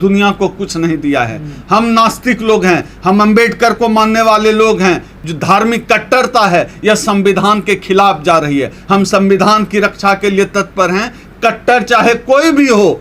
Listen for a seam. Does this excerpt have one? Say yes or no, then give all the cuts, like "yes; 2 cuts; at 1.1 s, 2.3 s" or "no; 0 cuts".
yes; 1 cut; at 5.1 s